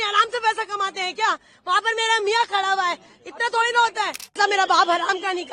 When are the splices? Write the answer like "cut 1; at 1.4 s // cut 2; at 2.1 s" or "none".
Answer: cut 1; at 4.4 s